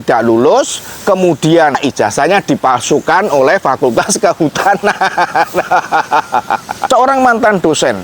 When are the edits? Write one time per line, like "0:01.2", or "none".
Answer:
0:01.8
0:06.7